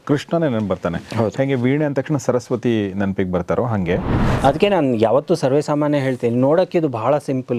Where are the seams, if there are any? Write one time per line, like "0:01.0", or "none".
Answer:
0:04.2